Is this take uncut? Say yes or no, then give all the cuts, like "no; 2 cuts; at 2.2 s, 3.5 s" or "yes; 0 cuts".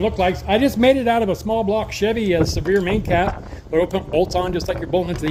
yes; 0 cuts